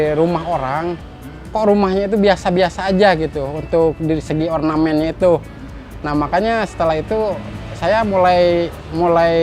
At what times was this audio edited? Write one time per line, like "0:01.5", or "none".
none